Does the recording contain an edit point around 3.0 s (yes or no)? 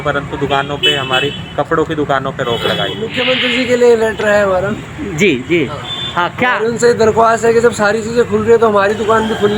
yes